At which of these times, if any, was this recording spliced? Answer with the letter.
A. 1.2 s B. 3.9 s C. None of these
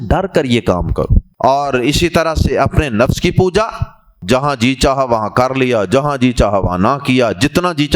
A